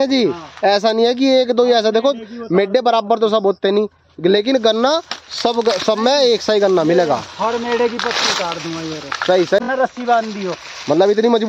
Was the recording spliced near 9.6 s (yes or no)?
yes